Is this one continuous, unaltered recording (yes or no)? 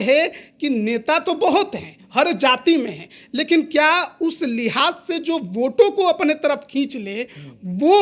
yes